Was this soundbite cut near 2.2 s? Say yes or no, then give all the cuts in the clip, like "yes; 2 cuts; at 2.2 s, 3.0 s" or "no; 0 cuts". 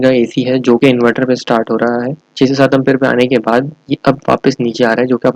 yes; 1 cut; at 2.2 s